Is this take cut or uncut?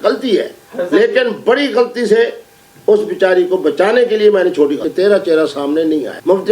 cut